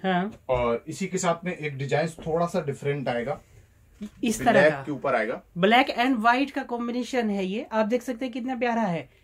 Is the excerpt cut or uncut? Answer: uncut